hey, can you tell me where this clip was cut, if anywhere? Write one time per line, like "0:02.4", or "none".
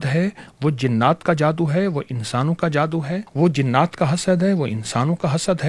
0:03.3

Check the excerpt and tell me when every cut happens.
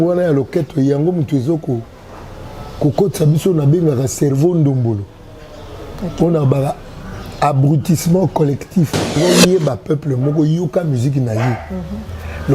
0:09.2

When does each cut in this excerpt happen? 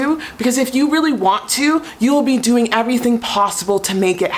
none

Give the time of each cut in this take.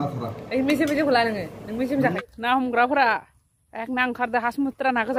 0:02.2

